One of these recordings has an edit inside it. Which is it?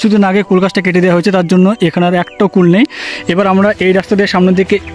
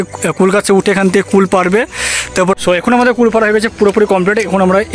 second; 1 cut; at 2.5 s

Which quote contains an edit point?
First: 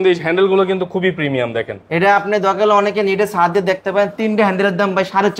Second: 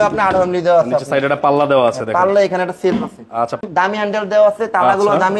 second; 1 cut; at 3.6 s

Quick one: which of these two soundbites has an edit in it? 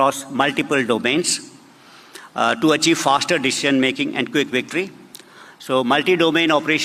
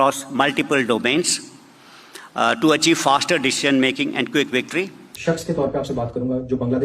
second; 1 cut; at 5.1 s

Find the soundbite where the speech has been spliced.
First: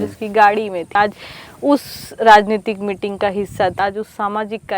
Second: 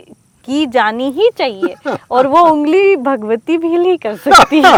first; 2 cuts; at 0.9 s, 3.8 s

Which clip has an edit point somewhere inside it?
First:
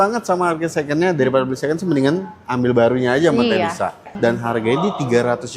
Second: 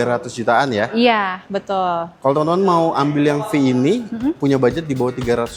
first; 1 cut; at 4.1 s

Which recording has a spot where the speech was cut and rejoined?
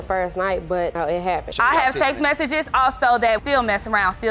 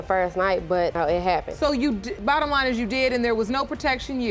first; 2 cuts; at 1.5 s, 3.4 s

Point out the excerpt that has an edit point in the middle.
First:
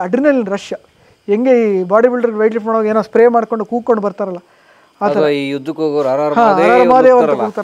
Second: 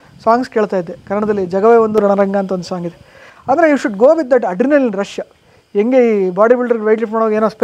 second; 1 cut; at 1.0 s

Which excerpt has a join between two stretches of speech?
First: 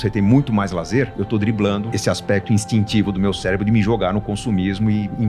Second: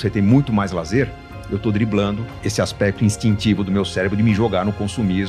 first; 2 cuts; at 1.2 s, 1.9 s

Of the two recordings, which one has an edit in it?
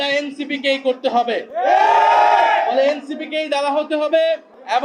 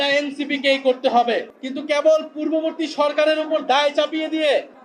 second; 1 cut; at 1.5 s

